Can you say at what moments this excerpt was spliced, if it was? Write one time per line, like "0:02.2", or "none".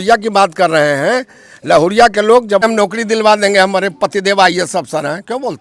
0:02.6